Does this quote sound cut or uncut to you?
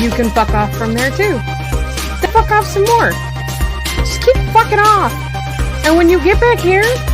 cut